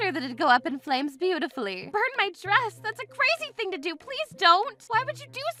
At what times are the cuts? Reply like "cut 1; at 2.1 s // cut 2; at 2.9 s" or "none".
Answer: none

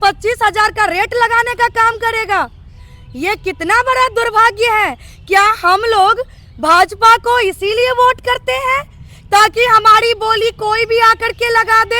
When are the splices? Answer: none

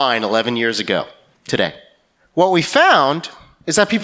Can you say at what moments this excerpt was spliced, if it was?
cut 1; at 1.6 s

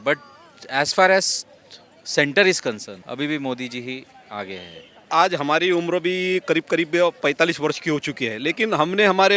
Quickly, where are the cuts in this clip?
cut 1; at 3.0 s // cut 2; at 5.1 s

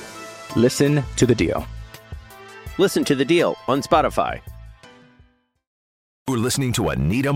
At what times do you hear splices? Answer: cut 1; at 6.3 s

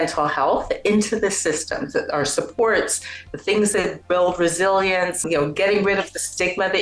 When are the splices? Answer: cut 1; at 5.2 s

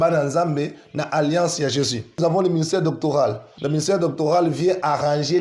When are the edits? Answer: cut 1; at 2.2 s // cut 2; at 3.5 s

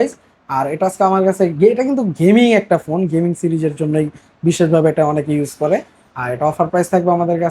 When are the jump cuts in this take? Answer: none

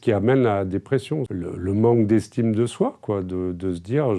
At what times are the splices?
cut 1; at 1.3 s

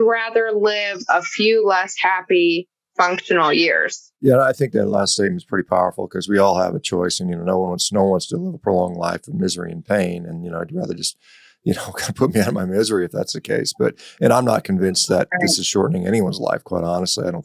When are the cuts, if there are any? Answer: none

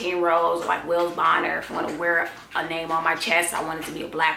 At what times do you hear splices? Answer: none

